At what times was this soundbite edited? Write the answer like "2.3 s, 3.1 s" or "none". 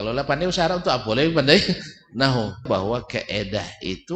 2.6 s